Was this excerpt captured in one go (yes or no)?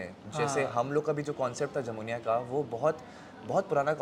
yes